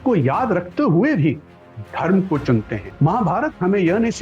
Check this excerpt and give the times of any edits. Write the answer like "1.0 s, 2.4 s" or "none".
2.8 s